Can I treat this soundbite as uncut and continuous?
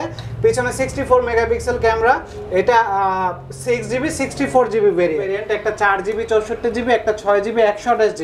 no; 1 cut; at 5.3 s

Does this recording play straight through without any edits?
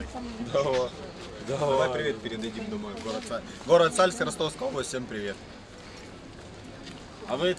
yes; 0 cuts

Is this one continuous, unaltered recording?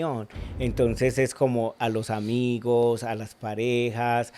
yes; 0 cuts

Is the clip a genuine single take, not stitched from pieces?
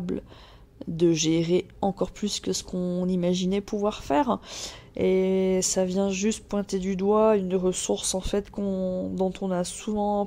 yes; 0 cuts

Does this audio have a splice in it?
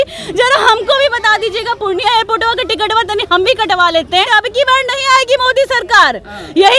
yes; 1 cut; at 4.3 s

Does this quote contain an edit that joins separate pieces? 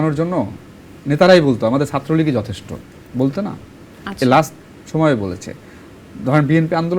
no; 0 cuts

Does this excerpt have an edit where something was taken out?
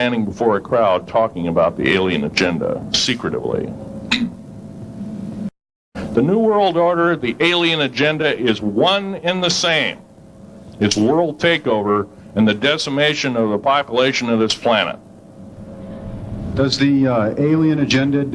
yes; 2 cuts; at 5.8 s, 15.8 s

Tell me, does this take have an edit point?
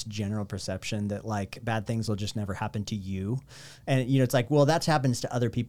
no; 0 cuts

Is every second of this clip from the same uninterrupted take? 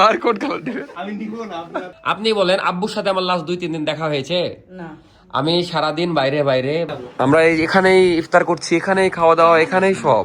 no; 2 cuts; at 1.9 s, 6.9 s

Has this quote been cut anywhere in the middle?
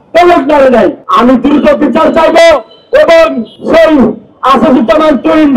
yes; 2 cuts; at 1.0 s, 3.5 s

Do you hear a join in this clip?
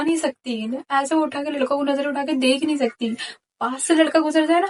no; 0 cuts

